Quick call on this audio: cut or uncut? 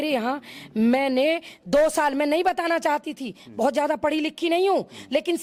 uncut